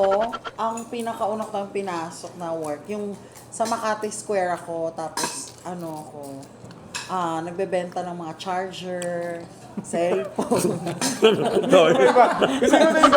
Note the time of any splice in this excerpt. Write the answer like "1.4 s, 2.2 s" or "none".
10.5 s